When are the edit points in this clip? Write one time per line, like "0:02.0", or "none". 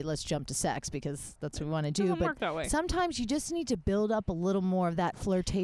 none